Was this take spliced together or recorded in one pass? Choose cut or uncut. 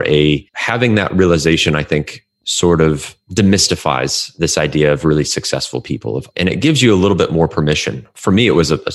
cut